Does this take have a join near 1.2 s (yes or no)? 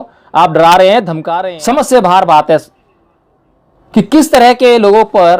yes